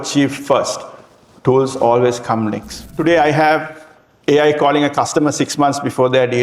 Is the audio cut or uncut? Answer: cut